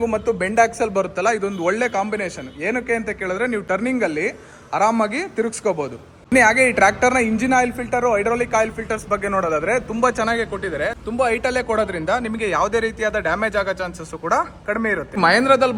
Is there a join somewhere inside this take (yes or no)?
no